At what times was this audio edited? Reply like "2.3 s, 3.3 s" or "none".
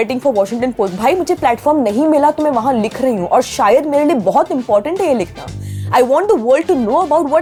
none